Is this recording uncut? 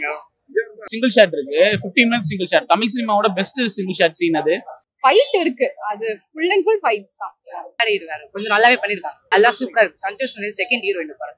no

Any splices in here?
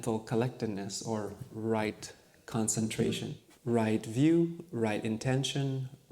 yes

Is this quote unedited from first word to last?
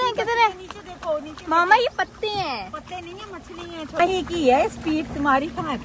no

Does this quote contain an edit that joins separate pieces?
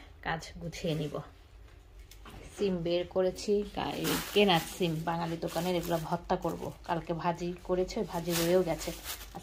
no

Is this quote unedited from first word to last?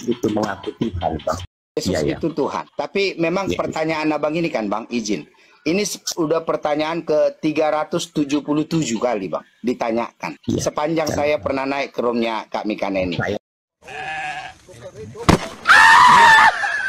no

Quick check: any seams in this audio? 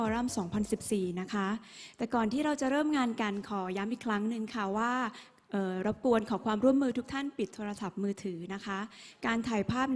no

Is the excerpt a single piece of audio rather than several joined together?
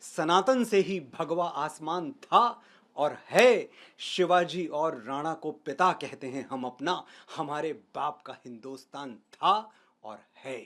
yes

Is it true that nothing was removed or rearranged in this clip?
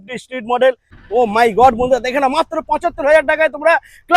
no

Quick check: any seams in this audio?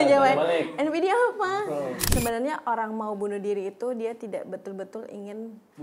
yes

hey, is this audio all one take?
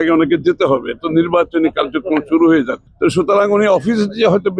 no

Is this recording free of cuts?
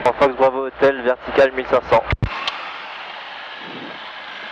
yes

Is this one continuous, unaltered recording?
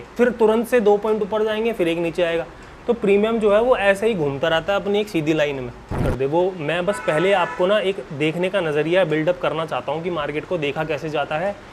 no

